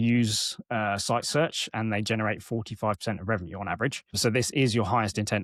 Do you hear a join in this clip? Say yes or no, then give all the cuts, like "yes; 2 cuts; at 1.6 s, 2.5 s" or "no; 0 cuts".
no; 0 cuts